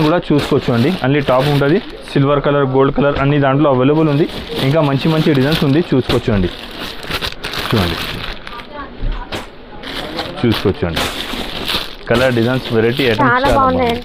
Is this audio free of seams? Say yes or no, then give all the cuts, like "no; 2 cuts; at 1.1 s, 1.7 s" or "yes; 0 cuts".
yes; 0 cuts